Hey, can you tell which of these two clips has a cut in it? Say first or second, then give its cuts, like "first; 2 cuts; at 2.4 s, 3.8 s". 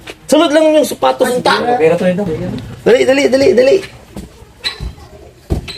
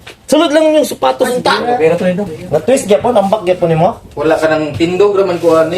second; 1 cut; at 2.3 s